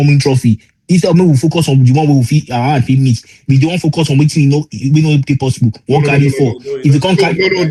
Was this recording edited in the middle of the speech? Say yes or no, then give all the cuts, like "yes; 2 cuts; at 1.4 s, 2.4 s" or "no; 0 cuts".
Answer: no; 0 cuts